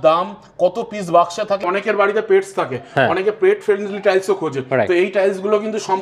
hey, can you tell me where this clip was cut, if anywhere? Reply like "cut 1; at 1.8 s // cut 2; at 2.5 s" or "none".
cut 1; at 1.7 s